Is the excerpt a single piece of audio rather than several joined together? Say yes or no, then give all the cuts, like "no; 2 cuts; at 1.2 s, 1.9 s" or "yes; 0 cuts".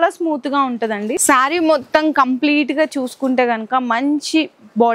no; 1 cut; at 1.2 s